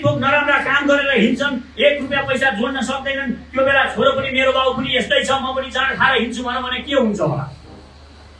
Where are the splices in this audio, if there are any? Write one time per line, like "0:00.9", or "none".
none